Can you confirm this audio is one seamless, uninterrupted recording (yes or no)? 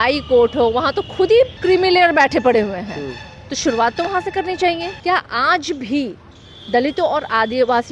no